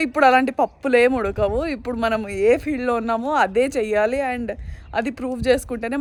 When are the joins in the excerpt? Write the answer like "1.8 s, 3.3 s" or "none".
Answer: none